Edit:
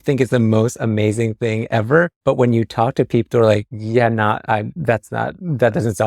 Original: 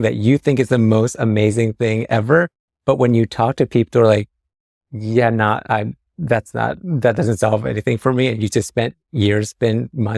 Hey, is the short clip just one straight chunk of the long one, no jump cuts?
no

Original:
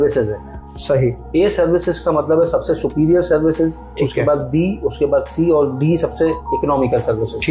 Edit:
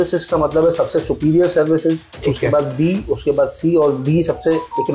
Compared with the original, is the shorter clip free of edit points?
yes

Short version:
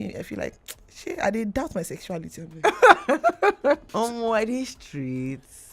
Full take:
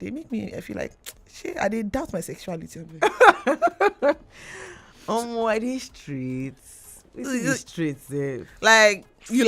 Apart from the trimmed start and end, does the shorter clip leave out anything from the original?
yes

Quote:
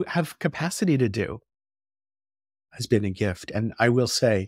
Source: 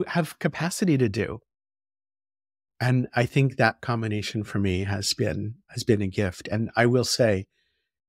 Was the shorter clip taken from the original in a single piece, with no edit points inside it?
no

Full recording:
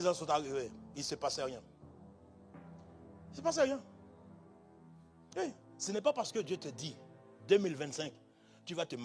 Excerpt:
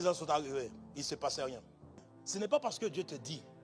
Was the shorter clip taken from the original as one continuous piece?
no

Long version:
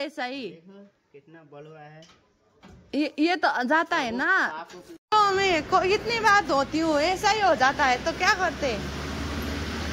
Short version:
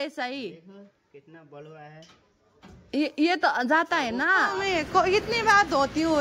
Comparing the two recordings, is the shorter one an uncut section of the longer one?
no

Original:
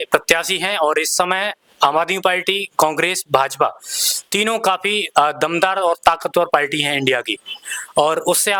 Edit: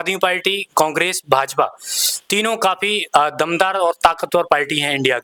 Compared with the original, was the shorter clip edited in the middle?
no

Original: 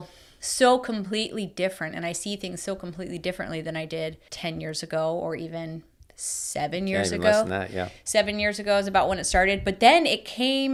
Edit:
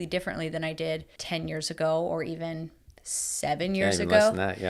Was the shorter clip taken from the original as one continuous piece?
yes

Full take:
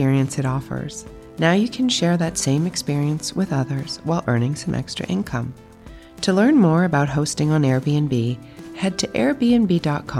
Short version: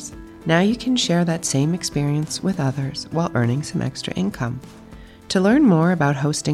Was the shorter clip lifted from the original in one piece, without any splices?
yes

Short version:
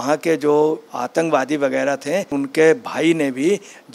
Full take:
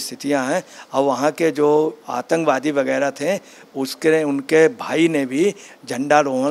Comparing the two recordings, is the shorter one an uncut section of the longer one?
no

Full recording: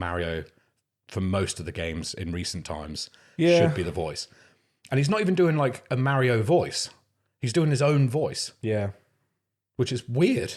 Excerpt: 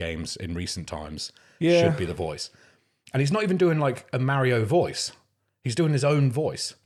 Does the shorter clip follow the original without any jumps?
yes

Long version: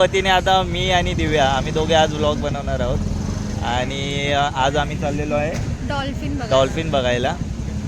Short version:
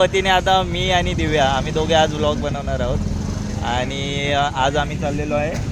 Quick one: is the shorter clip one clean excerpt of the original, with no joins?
yes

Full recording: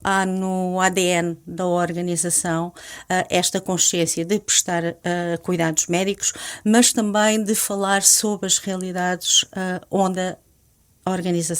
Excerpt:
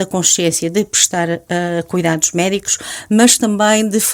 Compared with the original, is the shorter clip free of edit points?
yes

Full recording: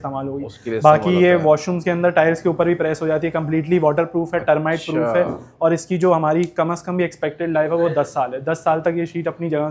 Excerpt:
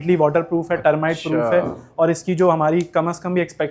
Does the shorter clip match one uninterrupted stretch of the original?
yes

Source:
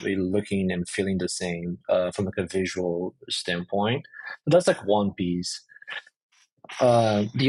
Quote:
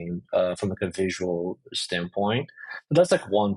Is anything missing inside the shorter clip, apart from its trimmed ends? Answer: no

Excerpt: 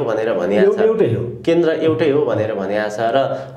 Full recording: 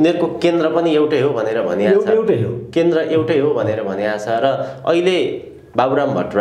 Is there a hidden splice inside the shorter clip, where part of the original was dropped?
no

